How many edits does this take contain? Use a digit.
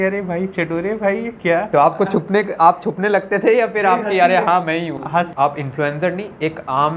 1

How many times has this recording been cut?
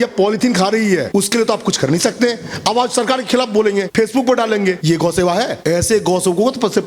0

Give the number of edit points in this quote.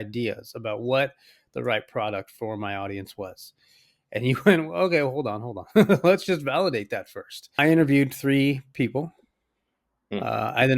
1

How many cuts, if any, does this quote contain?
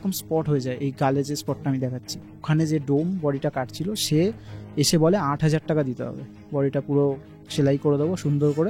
1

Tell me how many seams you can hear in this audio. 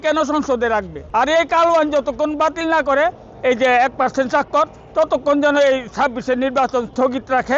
1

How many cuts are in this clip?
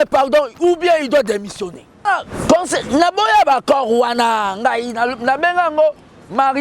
1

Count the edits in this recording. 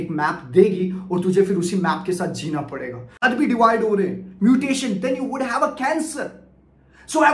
1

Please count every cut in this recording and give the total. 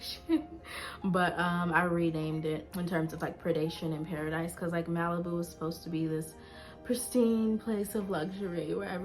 1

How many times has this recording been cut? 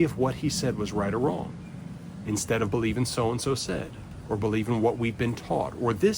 0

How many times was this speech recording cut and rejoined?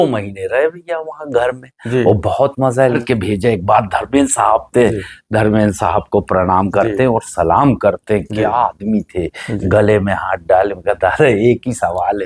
1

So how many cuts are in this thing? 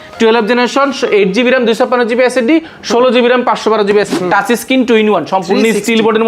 1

